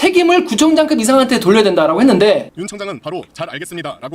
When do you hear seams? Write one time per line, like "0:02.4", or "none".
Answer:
0:02.5